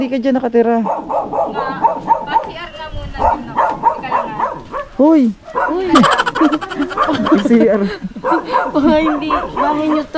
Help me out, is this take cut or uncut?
uncut